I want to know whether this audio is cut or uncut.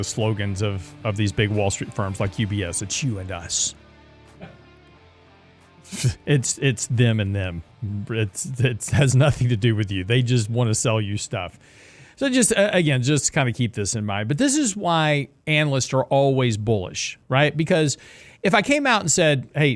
uncut